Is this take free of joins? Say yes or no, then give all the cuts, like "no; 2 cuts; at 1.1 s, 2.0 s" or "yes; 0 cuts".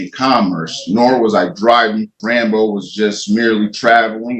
no; 1 cut; at 2.1 s